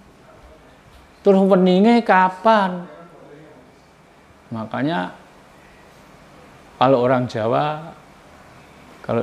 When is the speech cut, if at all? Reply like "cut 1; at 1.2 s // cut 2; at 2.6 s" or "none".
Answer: none